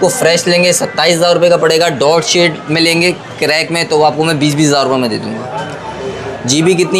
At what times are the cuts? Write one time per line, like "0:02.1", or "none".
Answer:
none